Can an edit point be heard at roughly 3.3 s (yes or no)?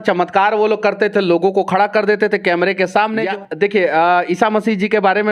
yes